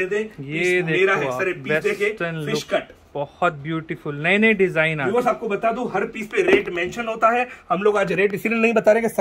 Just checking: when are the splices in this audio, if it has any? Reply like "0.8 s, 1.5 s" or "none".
none

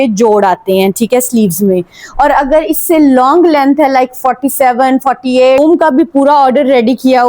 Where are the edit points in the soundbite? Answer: 5.6 s

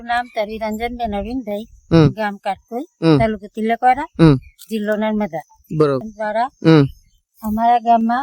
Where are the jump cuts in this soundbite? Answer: 6.1 s

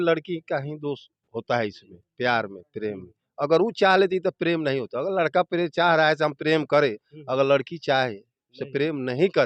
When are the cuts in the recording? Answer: none

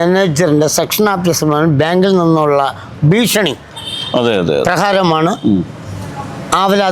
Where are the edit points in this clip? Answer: none

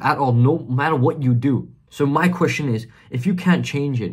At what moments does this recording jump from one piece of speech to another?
1.8 s

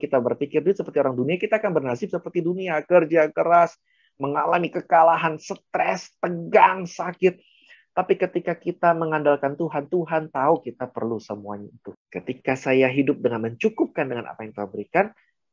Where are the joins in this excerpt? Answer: 11.8 s

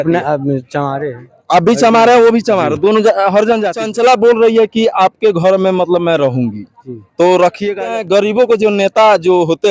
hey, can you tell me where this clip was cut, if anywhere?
3.9 s, 7.9 s

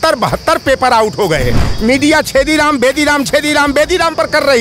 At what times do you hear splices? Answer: 1.7 s

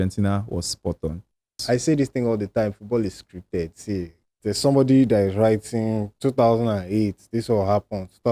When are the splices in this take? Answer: 1.6 s

